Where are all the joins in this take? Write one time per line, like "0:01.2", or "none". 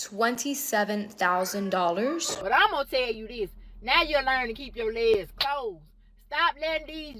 0:02.3